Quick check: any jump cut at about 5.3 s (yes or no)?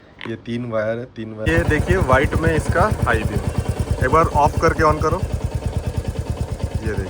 no